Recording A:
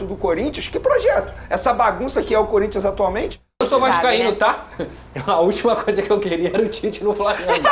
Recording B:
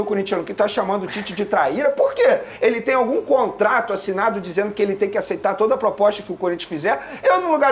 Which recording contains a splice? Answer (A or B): A